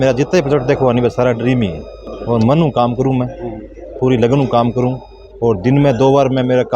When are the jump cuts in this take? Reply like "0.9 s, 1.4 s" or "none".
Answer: none

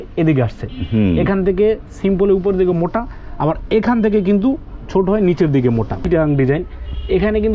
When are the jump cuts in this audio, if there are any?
6.0 s

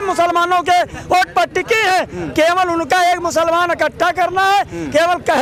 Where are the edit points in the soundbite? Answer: none

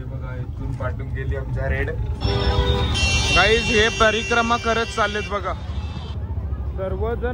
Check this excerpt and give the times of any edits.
2.2 s

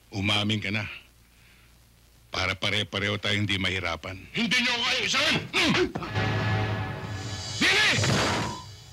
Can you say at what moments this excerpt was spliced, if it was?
4.2 s

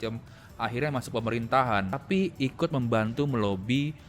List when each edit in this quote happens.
2.0 s

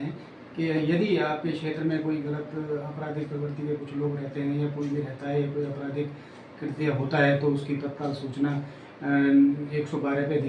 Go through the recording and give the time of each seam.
none

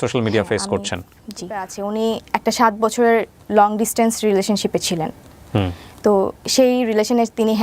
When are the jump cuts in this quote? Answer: 1.7 s

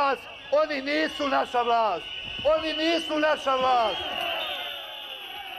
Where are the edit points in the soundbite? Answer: 2.8 s

